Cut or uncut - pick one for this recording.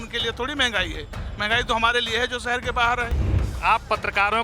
cut